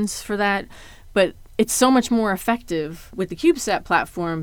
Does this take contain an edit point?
yes; 1 cut; at 3.1 s

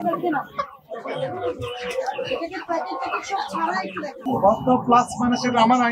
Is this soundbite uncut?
no; 1 cut; at 4.2 s

